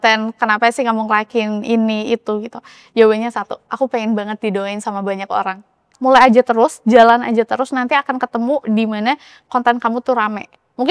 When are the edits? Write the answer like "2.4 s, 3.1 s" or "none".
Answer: 5.8 s